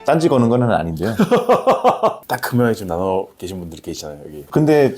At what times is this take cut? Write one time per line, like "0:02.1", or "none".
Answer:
0:02.2